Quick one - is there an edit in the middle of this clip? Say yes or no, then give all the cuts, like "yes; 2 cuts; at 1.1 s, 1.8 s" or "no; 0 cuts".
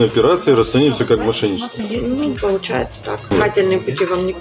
yes; 1 cut; at 3.3 s